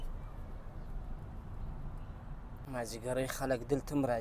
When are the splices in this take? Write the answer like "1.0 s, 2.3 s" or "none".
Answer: 2.6 s